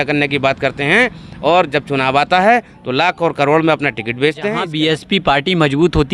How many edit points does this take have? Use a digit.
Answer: 1